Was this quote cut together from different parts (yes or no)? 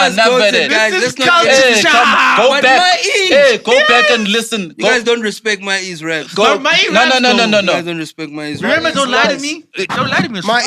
no